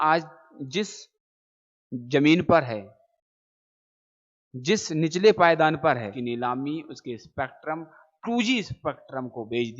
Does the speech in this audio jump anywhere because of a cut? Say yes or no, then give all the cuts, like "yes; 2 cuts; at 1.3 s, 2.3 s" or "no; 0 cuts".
yes; 1 cut; at 6.1 s